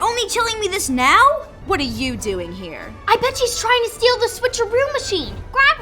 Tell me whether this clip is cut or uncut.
cut